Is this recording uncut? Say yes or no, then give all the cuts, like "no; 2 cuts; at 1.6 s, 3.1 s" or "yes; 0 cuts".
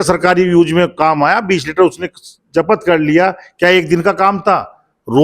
yes; 0 cuts